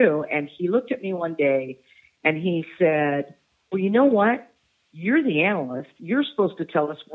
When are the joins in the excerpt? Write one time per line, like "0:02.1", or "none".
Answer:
none